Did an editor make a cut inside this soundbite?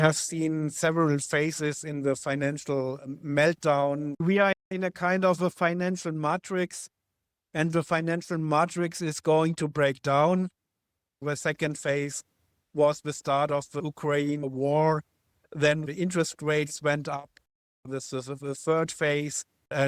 yes; 2 cuts; at 4.1 s, 11.2 s

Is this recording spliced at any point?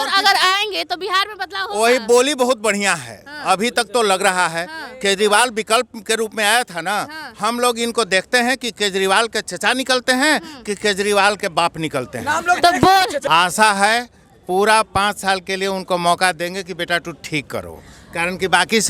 yes; 1 cut; at 13.2 s

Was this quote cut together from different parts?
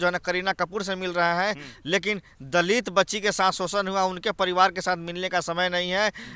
no; 0 cuts

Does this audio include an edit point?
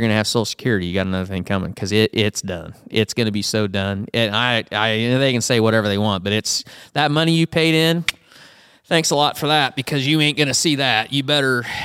no; 0 cuts

